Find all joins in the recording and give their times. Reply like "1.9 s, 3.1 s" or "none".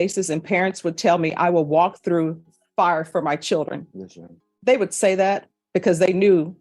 none